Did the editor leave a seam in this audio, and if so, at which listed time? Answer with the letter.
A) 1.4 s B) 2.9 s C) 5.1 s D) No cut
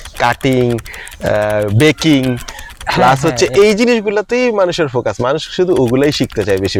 D